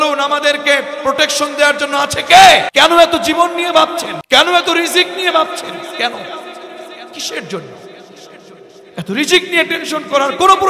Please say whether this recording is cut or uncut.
cut